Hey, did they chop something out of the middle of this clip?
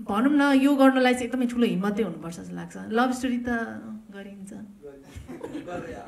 no; 0 cuts

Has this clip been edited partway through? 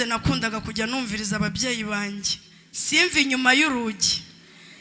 no; 0 cuts

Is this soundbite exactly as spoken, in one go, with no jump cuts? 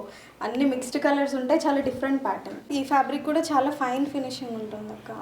no; 1 cut; at 2.6 s

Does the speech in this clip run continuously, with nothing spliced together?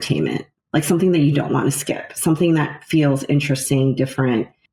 yes; 0 cuts

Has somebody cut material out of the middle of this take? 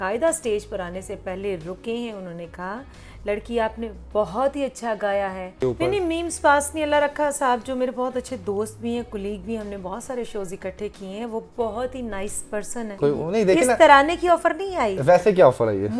yes; 2 cuts; at 5.6 s, 12.8 s

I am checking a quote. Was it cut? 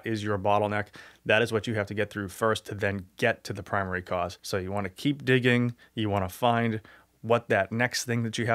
yes; 1 cut; at 4.4 s

